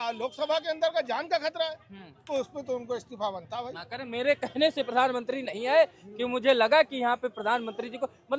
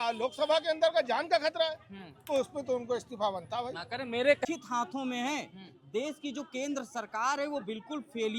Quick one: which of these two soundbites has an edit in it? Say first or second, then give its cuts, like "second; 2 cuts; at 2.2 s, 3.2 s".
second; 1 cut; at 4.5 s